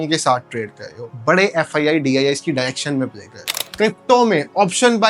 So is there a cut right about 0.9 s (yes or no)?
no